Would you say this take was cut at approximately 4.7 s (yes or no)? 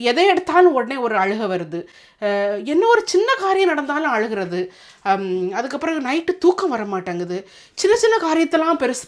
no